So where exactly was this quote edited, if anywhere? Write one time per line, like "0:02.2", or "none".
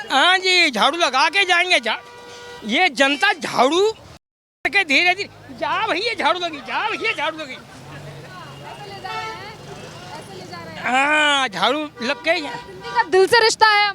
none